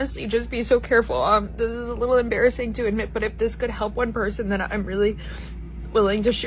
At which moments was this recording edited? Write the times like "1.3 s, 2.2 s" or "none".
none

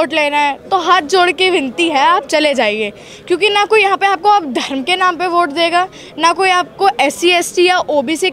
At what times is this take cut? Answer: none

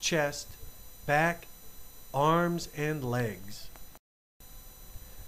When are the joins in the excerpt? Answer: 4.0 s

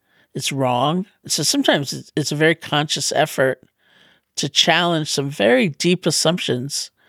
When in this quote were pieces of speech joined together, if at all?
none

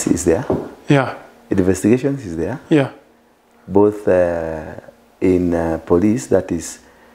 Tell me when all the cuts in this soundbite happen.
none

